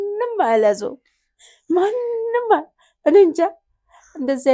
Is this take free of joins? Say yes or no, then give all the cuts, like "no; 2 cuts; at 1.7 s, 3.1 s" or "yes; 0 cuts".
yes; 0 cuts